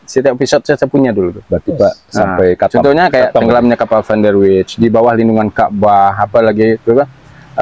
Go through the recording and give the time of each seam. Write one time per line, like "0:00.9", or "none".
none